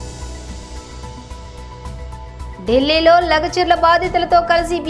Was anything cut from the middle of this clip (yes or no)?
no